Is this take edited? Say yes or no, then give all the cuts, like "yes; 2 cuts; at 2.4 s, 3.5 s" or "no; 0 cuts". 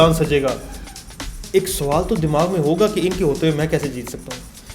yes; 1 cut; at 1.2 s